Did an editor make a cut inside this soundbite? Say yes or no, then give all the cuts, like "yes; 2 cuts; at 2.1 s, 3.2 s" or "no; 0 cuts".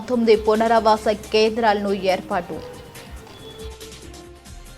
yes; 1 cut; at 2.8 s